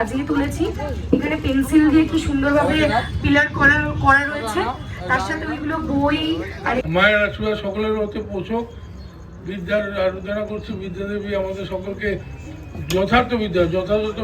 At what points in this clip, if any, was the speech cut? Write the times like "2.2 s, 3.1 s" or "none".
6.8 s